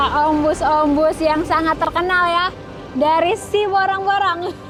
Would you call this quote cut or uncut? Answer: uncut